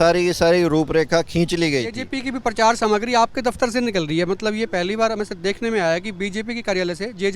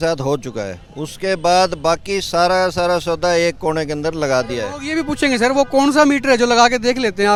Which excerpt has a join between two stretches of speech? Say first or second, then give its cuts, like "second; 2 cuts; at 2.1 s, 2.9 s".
first; 1 cut; at 2.1 s